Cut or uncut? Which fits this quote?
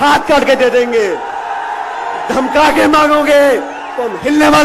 uncut